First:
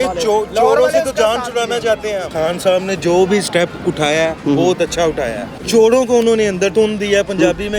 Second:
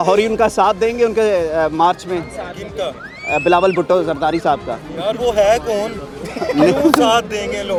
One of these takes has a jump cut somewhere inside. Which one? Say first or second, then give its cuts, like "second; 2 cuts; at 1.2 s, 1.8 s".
first; 3 cuts; at 2.3 s, 5.6 s, 6.7 s